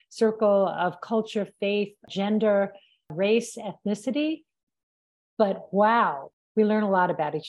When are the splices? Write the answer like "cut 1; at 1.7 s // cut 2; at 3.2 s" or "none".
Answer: cut 1; at 3.1 s // cut 2; at 6.3 s

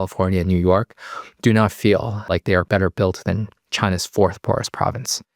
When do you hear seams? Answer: cut 1; at 2.6 s

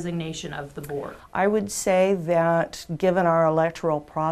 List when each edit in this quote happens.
cut 1; at 1.2 s

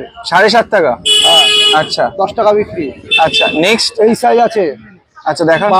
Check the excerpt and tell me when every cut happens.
none

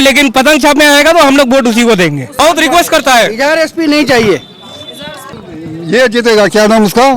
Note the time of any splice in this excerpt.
cut 1; at 2.3 s // cut 2; at 5.2 s

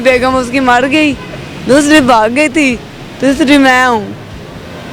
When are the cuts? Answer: none

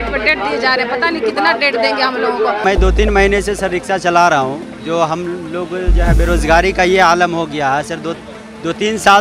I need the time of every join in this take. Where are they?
cut 1; at 2.6 s

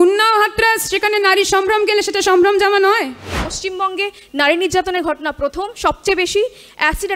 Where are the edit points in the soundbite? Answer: cut 1; at 3.5 s

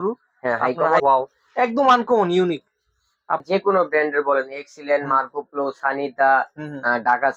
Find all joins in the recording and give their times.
cut 1; at 1.0 s // cut 2; at 3.4 s

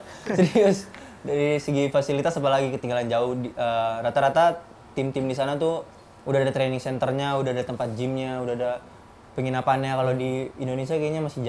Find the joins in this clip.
none

